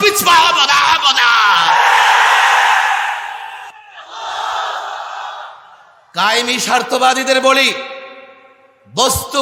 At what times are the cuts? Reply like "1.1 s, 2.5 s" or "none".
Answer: none